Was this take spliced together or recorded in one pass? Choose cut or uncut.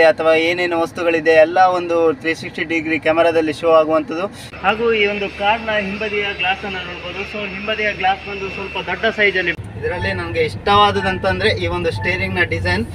cut